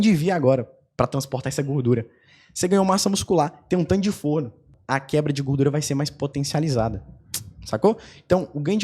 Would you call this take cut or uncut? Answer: cut